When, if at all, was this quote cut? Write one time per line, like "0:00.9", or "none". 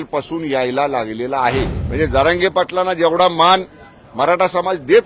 0:01.8